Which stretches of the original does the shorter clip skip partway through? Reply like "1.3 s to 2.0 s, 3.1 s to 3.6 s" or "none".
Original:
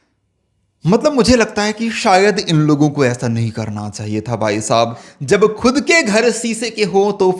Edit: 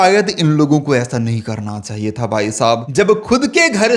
5.0 s to 5.2 s